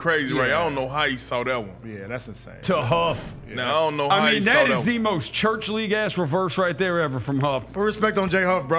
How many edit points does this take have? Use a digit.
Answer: 0